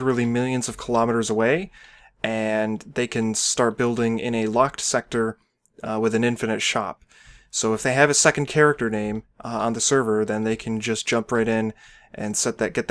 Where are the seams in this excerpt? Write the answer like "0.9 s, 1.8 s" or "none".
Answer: 3.5 s